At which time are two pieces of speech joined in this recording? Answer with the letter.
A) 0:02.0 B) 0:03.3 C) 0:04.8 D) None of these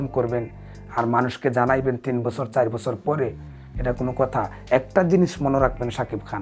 D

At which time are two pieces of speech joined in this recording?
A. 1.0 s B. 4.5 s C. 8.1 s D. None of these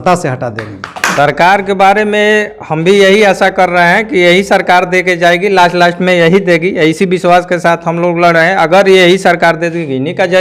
A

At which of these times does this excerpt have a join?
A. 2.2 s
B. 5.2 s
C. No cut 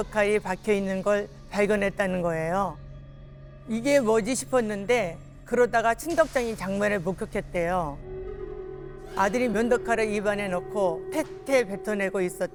C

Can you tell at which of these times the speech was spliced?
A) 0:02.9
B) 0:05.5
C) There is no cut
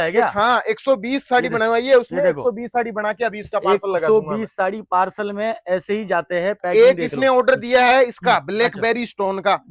C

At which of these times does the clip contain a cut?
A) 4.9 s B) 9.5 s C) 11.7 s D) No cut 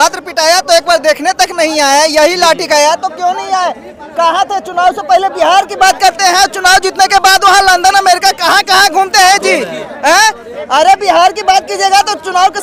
D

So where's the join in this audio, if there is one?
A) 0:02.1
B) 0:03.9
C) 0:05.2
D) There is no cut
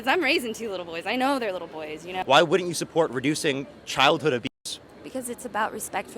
A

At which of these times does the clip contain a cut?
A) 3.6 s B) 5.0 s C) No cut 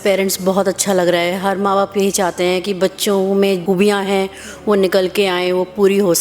A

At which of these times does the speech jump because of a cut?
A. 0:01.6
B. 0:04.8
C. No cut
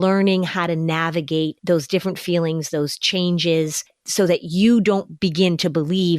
A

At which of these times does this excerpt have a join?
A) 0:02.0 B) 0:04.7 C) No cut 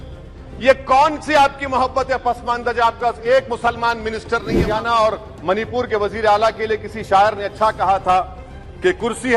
B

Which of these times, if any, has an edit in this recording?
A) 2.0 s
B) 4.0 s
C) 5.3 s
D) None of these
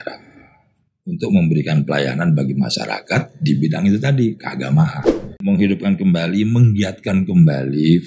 C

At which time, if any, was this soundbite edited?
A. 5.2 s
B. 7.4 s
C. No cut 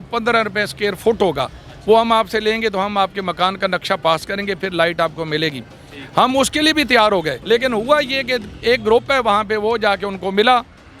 B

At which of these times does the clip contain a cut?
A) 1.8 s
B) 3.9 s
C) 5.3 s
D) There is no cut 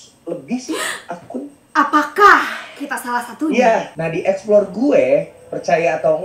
B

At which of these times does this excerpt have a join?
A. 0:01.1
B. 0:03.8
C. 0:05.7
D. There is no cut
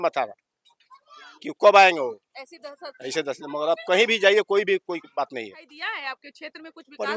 C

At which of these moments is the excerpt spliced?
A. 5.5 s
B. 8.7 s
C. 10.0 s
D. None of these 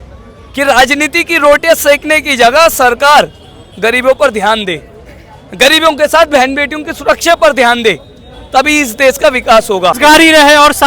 C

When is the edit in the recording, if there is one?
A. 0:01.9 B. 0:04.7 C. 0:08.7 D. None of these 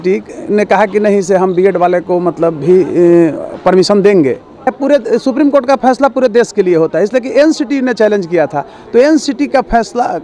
B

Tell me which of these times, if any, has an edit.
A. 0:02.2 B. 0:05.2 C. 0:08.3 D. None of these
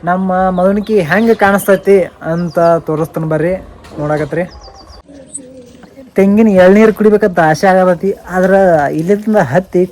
B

